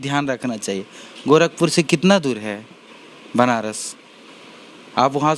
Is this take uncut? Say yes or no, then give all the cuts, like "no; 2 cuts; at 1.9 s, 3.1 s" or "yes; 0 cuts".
yes; 0 cuts